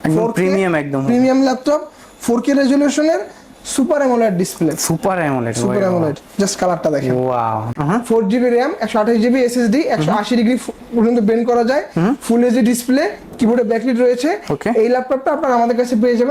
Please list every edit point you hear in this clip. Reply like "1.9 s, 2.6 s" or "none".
7.7 s